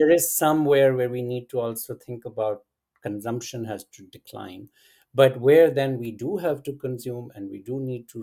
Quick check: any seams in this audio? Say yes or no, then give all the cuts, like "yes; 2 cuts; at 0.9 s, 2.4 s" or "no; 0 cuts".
no; 0 cuts